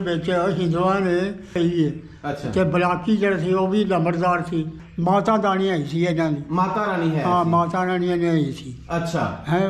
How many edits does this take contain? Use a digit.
2